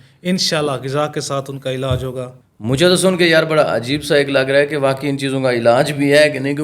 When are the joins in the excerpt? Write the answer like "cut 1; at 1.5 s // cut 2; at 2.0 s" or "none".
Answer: none

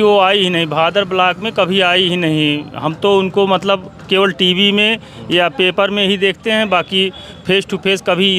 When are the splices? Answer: none

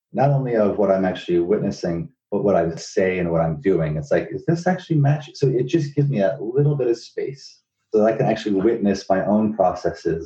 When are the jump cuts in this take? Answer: cut 1; at 2.8 s // cut 2; at 7.7 s

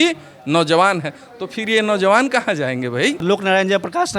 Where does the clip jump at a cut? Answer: cut 1; at 3.2 s

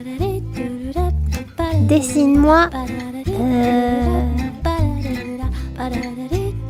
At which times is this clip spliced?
none

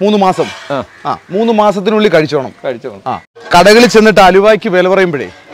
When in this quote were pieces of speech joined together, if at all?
cut 1; at 3.3 s

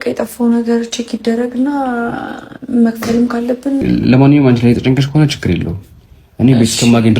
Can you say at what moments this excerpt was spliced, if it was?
cut 1; at 3.8 s

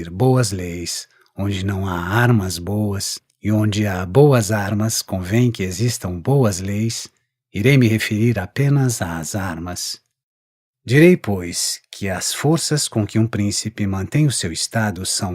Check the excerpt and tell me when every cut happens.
cut 1; at 2.6 s

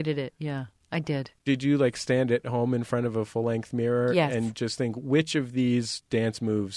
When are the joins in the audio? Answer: cut 1; at 1.4 s

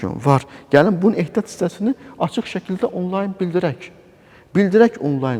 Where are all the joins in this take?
none

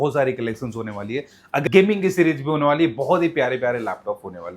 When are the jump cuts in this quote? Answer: cut 1; at 1.7 s

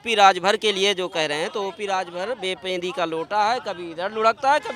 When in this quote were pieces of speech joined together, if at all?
none

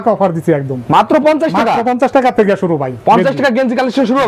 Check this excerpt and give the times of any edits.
none

